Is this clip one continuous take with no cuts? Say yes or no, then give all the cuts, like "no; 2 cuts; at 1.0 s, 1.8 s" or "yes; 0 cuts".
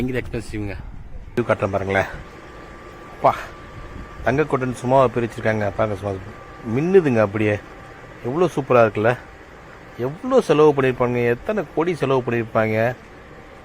no; 1 cut; at 1.4 s